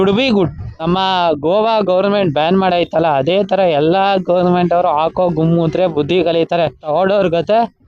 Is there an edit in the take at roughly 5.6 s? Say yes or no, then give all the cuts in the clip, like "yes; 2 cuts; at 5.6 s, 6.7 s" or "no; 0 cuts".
no; 2 cuts; at 0.9 s, 6.8 s